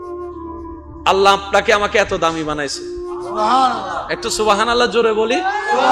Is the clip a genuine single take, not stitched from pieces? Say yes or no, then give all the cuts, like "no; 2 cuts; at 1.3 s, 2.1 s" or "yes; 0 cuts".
yes; 0 cuts